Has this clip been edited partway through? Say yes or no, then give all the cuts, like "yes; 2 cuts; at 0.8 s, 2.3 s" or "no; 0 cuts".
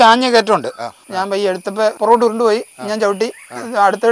yes; 2 cuts; at 1.0 s, 2.0 s